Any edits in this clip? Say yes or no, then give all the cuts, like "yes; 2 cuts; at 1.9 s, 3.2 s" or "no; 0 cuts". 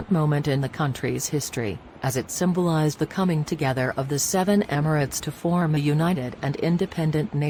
no; 0 cuts